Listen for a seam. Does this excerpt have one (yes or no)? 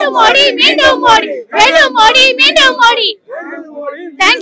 no